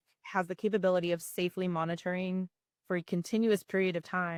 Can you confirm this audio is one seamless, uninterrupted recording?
yes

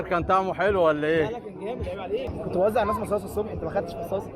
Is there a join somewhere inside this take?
yes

